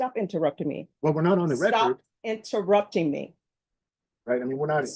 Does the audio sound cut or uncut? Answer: uncut